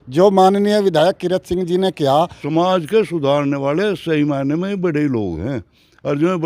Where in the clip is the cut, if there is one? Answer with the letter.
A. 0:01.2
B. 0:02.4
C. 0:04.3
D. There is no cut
B